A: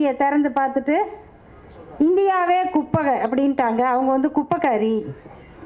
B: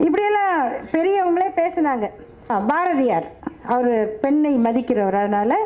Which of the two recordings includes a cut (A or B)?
B